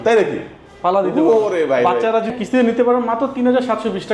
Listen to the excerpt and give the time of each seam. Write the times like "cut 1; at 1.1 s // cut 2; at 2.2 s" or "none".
cut 1; at 2.3 s